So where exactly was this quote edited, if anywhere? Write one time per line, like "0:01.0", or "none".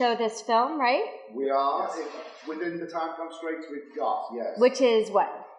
0:01.2